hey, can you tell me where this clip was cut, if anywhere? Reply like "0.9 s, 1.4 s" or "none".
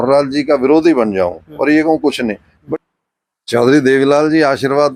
2.6 s